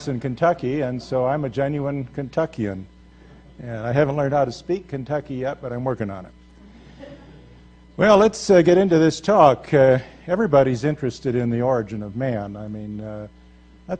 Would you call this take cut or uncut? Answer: cut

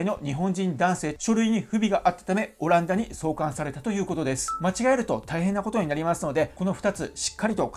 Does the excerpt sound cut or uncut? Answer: cut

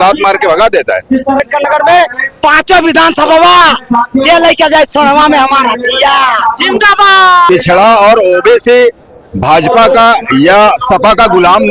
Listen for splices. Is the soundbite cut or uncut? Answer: cut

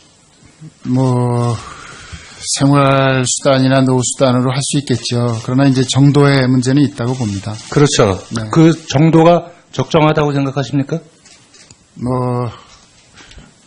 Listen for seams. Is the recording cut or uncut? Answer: cut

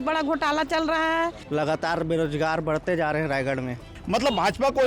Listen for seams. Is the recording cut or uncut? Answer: cut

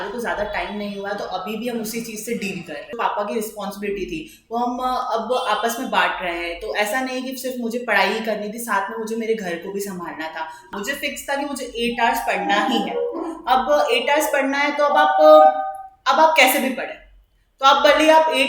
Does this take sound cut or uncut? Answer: cut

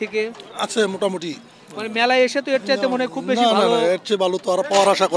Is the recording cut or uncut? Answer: uncut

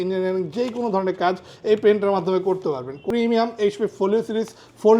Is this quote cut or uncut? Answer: cut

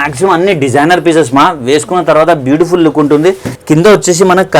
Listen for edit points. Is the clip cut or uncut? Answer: cut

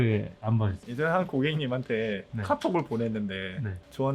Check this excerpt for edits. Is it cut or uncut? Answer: uncut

